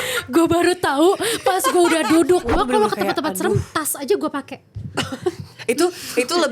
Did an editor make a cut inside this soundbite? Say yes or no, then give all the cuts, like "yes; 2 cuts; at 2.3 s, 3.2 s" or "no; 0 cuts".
yes; 1 cut; at 2.5 s